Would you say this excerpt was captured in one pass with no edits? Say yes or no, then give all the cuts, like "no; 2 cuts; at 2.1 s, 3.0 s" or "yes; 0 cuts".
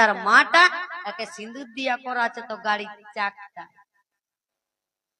yes; 0 cuts